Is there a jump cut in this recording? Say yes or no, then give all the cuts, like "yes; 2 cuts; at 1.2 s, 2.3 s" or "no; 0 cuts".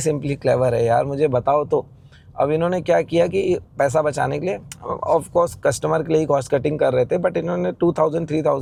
no; 0 cuts